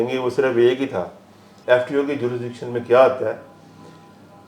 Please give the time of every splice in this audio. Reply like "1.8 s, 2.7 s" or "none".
1.5 s